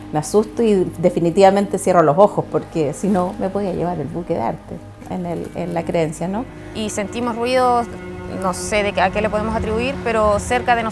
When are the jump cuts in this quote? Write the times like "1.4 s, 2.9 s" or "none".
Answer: 6.6 s